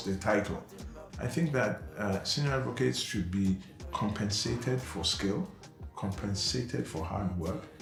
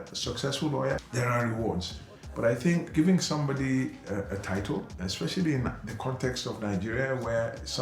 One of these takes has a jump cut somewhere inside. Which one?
second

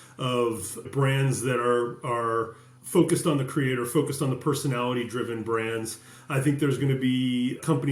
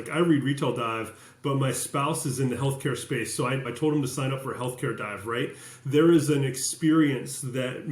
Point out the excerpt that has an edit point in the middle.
second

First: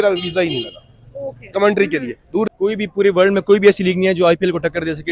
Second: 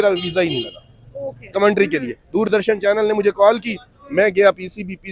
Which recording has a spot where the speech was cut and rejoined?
first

